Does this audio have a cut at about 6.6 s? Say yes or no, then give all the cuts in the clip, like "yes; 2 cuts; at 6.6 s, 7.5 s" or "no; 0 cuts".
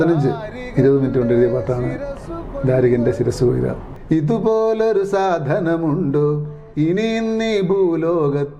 no; 1 cut; at 3.9 s